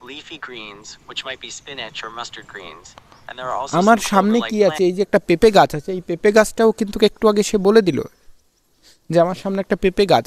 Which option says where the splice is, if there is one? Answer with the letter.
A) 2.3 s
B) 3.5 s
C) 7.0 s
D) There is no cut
B